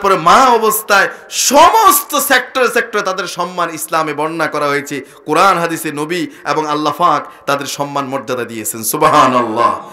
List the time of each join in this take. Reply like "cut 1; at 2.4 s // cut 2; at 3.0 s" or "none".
none